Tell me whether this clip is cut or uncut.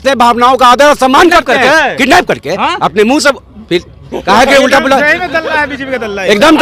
uncut